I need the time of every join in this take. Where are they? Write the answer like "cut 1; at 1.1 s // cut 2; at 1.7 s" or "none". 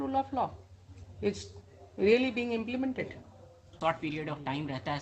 cut 1; at 3.7 s